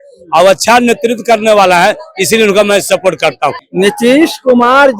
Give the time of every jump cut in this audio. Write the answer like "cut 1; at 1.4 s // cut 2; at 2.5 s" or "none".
cut 1; at 3.6 s